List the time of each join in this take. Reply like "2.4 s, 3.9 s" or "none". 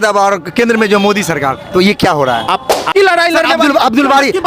2.9 s